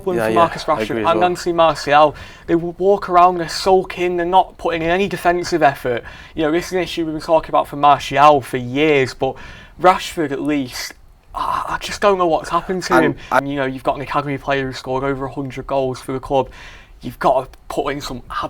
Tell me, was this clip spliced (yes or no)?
yes